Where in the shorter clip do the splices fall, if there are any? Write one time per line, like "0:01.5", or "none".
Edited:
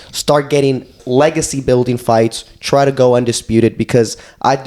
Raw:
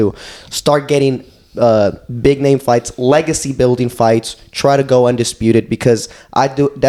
0:01.0